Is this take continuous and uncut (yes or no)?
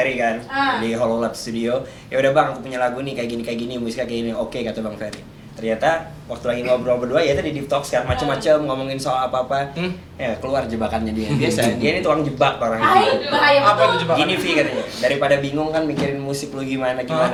yes